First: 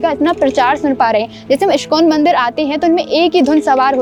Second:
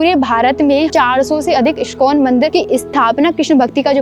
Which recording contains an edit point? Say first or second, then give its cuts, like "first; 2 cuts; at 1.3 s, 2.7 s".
second; 2 cuts; at 0.9 s, 2.5 s